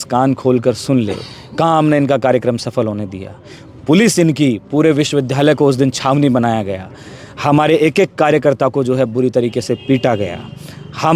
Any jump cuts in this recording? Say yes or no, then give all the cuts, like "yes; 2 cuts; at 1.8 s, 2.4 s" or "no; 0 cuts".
no; 0 cuts